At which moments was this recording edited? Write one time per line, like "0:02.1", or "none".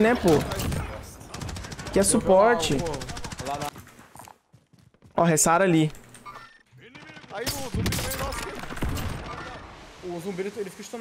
0:03.8